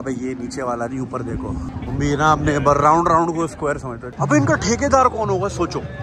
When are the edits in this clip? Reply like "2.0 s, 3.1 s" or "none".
1.7 s, 4.0 s